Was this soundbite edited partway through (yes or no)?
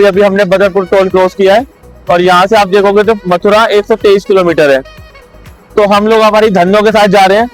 no